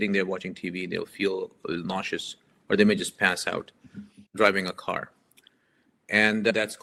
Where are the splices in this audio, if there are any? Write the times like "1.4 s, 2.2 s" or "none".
none